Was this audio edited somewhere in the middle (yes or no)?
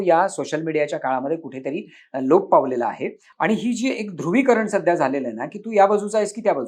no